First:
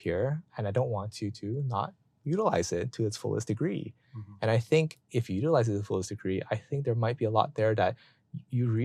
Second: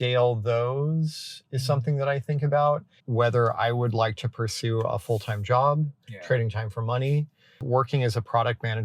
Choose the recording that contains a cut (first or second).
second